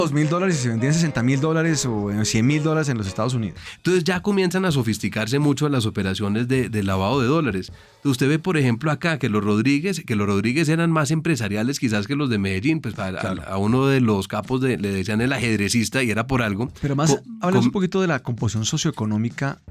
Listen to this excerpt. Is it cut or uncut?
cut